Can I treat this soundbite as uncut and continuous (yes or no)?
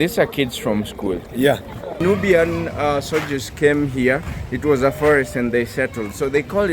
no